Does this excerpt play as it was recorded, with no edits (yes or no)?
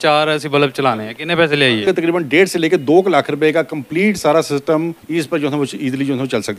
no